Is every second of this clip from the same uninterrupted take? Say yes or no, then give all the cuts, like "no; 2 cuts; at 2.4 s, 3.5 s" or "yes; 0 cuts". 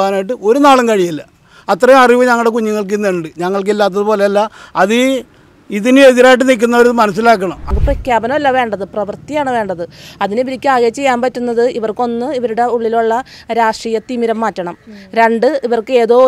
no; 1 cut; at 7.6 s